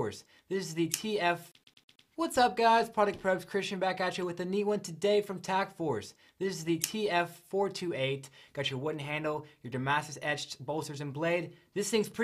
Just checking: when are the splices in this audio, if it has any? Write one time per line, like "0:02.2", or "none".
0:01.5